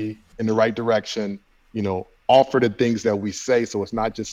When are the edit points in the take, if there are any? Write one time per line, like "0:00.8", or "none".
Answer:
none

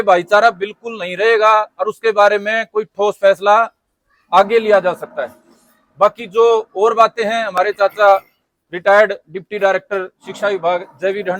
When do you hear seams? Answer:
none

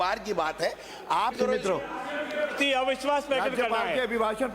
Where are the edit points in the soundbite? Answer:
0:01.3

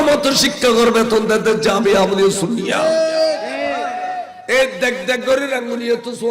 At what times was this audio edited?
0:04.3

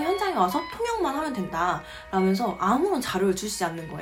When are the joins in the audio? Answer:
none

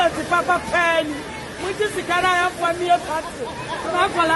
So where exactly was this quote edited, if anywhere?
none

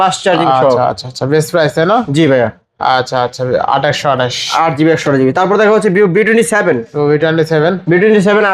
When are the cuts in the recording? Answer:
none

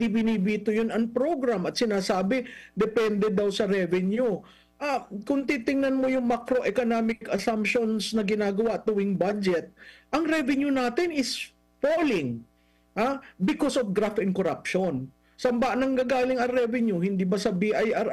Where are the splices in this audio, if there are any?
none

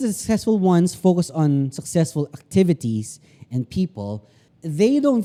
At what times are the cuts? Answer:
none

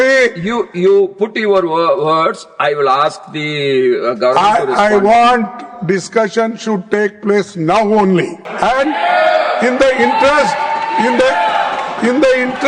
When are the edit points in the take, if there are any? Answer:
0:08.4

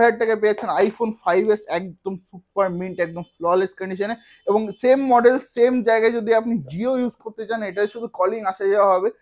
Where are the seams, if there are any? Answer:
none

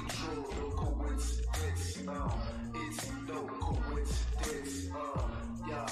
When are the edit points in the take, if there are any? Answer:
none

